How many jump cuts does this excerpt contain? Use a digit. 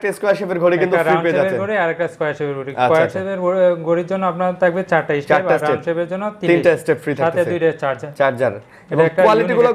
0